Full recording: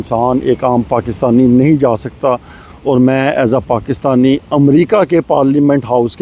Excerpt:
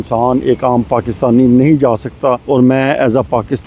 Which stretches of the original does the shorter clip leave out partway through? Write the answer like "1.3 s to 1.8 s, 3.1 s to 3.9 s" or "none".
2.4 s to 2.8 s